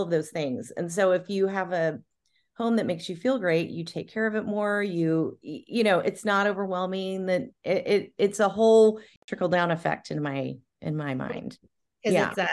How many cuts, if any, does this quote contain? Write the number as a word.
one